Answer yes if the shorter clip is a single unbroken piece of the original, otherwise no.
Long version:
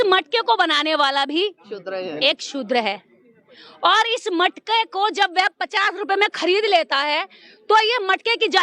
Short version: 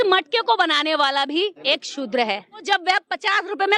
no